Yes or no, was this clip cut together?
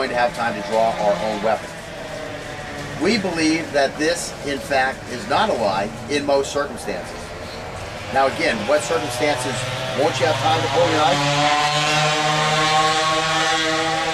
yes